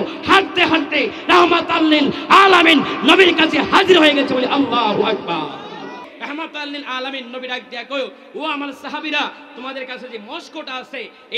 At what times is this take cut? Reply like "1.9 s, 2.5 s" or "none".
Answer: 6.1 s